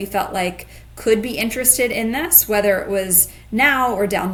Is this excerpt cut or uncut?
uncut